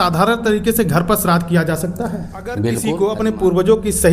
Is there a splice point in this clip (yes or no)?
yes